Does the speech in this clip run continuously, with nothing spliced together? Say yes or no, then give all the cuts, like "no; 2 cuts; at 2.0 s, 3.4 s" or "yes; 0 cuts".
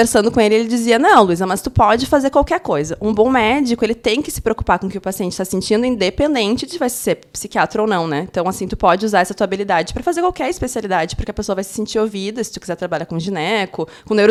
yes; 0 cuts